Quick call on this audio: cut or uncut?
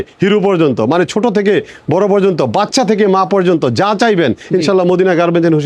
uncut